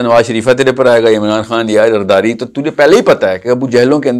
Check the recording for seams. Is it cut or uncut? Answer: uncut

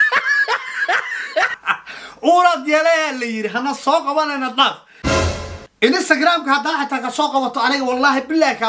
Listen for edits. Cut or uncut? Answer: cut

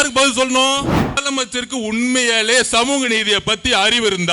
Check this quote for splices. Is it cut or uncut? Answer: cut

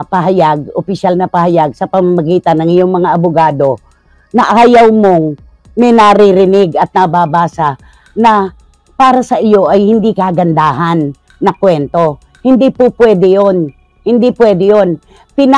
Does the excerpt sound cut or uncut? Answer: uncut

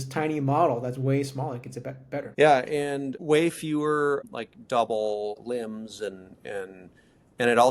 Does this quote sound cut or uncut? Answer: cut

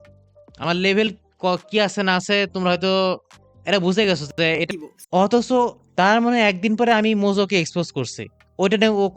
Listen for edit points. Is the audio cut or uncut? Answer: cut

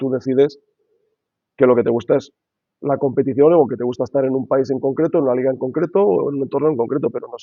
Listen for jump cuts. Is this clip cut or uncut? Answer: uncut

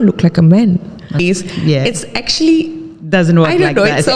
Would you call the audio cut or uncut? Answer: cut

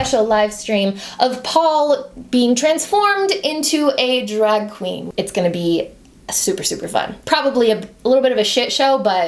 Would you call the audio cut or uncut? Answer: cut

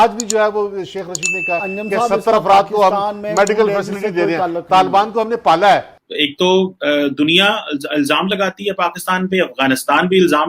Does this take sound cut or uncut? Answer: cut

